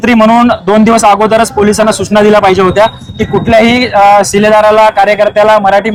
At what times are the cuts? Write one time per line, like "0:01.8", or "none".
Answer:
none